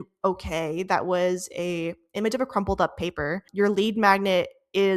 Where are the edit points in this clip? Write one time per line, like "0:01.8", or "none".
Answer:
0:03.4